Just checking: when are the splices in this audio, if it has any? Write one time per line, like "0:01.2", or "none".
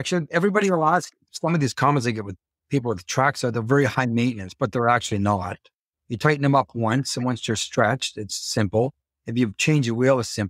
0:01.2